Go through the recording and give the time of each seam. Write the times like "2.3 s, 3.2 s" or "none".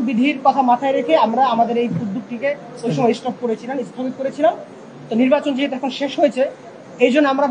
none

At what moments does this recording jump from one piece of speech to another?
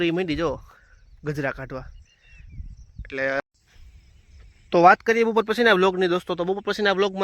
3.4 s

